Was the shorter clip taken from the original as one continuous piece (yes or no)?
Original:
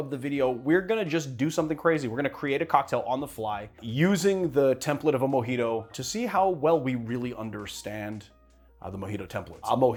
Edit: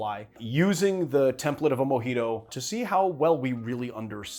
yes